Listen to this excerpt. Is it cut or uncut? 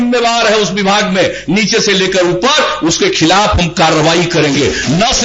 uncut